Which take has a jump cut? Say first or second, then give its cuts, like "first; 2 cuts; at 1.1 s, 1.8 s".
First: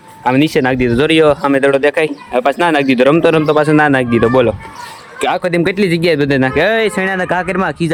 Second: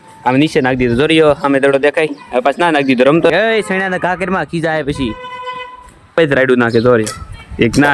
second; 2 cuts; at 3.3 s, 6.2 s